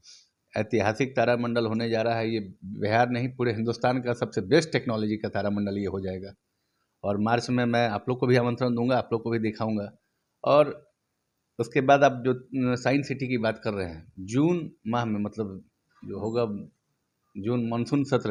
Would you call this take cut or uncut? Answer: uncut